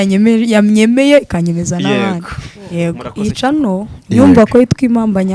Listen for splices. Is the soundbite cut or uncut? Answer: cut